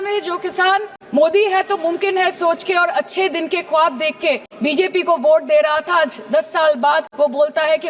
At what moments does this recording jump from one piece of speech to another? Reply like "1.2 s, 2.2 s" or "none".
1.0 s, 4.5 s, 7.1 s